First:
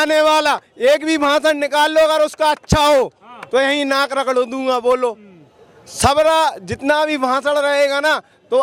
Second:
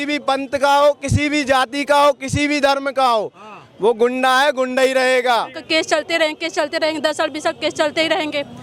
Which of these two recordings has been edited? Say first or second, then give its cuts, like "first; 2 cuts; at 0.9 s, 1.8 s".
second; 1 cut; at 5.6 s